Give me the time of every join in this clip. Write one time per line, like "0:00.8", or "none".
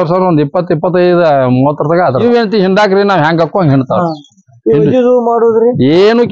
0:02.2